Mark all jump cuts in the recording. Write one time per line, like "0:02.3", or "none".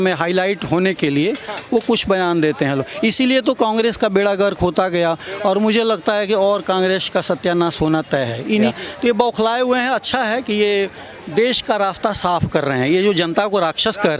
0:08.7